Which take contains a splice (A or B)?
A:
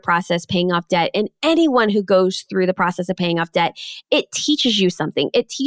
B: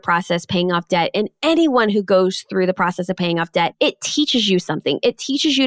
B